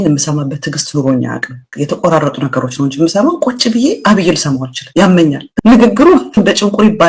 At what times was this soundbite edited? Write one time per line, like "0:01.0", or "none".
none